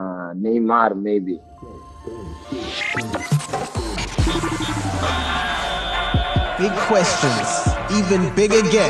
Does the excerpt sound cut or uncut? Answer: cut